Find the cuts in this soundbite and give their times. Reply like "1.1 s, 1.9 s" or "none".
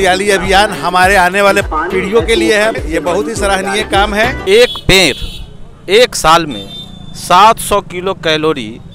1.7 s, 2.8 s, 4.4 s